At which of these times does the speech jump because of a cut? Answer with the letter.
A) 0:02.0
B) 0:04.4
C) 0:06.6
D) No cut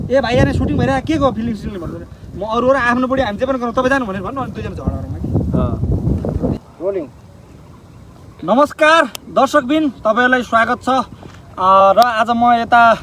C